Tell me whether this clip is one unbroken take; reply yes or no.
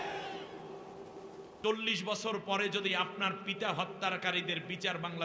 no